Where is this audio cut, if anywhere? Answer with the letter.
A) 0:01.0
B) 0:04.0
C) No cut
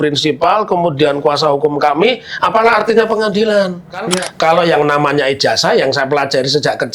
B